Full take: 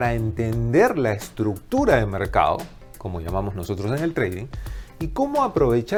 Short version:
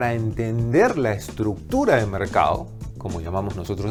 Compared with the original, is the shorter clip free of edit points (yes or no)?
yes